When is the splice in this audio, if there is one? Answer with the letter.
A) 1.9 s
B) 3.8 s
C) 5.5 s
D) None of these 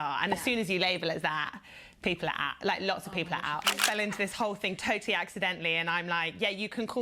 B